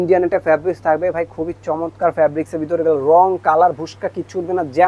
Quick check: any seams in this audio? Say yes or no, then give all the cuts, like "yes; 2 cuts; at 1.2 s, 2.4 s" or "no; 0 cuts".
no; 0 cuts